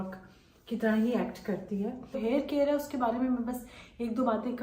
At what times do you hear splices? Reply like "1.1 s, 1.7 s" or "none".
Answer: 2.2 s